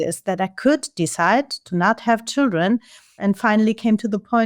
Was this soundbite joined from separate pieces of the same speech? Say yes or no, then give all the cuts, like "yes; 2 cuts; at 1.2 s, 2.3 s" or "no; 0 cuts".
yes; 1 cut; at 3.2 s